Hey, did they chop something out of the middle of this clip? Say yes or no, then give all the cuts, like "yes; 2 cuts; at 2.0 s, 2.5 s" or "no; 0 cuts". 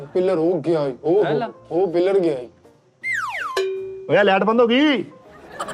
no; 0 cuts